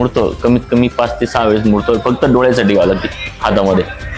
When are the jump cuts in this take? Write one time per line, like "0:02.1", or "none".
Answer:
none